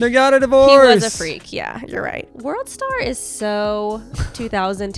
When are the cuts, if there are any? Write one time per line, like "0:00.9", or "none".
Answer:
0:02.3